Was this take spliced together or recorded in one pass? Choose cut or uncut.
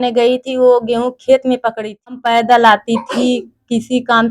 cut